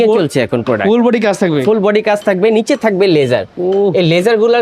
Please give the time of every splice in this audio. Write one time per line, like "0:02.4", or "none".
none